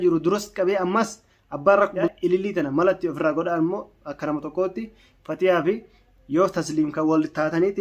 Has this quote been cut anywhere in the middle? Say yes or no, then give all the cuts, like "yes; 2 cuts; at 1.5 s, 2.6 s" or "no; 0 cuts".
yes; 1 cut; at 2.1 s